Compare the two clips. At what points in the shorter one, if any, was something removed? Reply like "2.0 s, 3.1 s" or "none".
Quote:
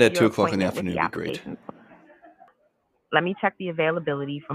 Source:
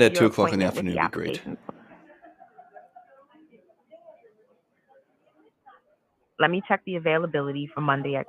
2.5 s